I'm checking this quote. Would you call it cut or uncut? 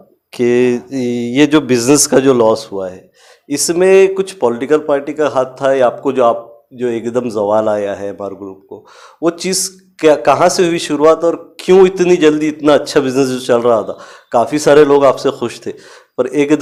uncut